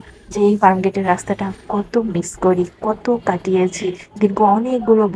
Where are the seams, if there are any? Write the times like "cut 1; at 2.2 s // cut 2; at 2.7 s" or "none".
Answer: none